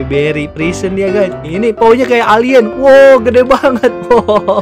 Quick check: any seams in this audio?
yes; 1 cut; at 1.4 s

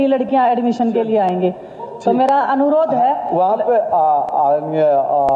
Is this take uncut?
yes; 0 cuts

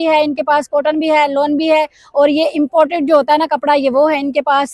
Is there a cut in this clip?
no; 0 cuts

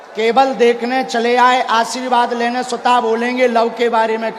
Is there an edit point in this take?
no; 0 cuts

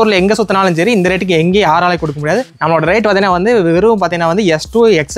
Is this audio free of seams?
yes; 0 cuts

